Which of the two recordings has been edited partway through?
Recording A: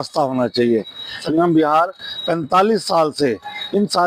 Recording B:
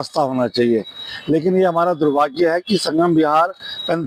A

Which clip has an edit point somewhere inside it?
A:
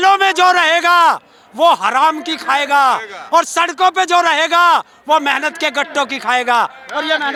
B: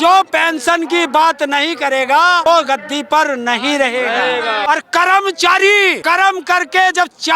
B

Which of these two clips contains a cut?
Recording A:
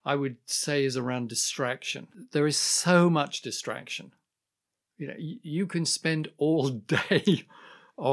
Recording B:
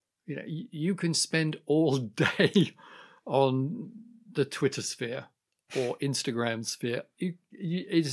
A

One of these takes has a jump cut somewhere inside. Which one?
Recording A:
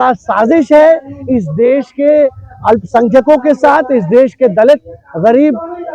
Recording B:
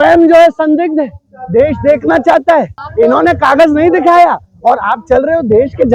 B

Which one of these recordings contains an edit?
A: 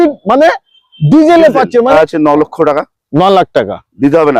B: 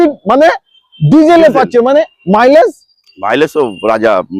A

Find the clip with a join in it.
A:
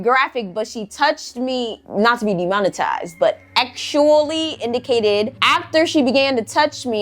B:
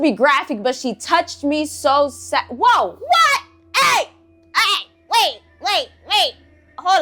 A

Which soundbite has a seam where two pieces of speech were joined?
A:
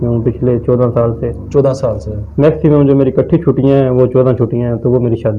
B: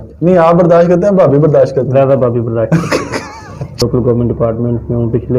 B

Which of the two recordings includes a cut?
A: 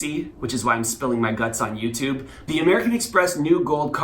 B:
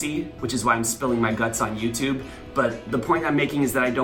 A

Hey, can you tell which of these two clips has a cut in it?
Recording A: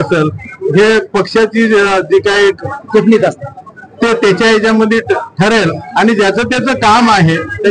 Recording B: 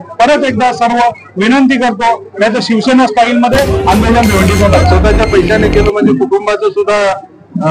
B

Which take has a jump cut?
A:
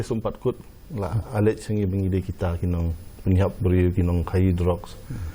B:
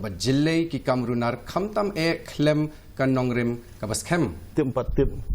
B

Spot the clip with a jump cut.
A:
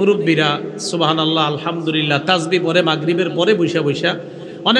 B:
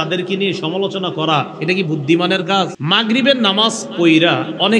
B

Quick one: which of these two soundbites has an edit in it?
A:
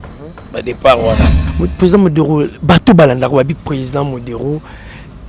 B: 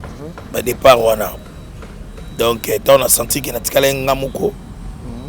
A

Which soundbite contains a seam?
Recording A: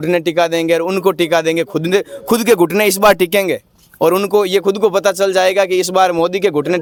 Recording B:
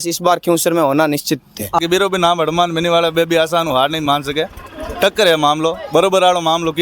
B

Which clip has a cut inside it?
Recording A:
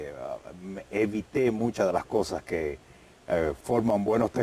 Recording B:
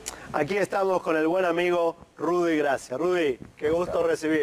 A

